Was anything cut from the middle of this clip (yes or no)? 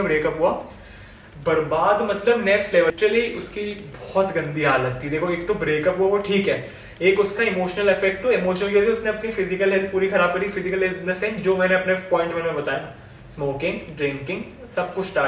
yes